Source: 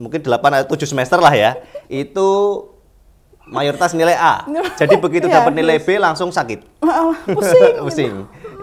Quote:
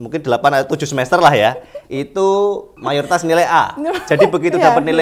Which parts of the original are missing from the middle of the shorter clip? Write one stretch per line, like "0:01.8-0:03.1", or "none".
0:02.7-0:03.4